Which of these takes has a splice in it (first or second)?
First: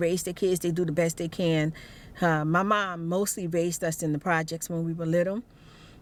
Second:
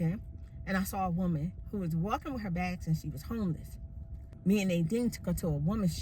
second